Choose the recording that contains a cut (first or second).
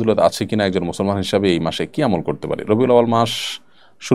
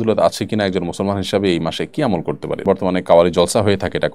second